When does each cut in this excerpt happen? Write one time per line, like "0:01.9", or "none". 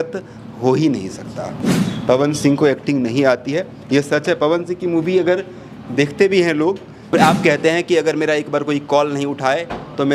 0:01.6
0:07.1